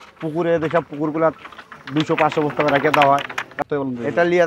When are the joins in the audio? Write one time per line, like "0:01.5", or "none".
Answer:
0:03.5